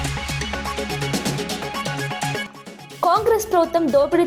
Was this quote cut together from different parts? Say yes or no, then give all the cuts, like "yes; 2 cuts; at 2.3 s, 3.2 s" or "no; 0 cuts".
yes; 1 cut; at 2.4 s